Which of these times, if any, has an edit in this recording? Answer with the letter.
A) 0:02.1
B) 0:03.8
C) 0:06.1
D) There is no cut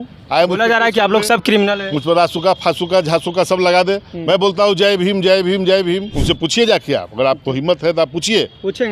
C